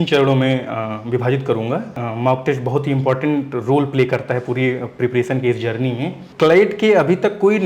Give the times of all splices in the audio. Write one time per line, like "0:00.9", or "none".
0:02.0
0:06.3